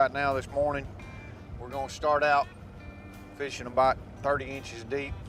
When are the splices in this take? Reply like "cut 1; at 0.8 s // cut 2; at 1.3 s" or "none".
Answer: none